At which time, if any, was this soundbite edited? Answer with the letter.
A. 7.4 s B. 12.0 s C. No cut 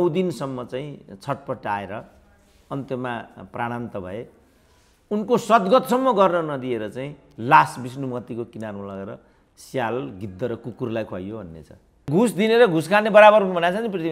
B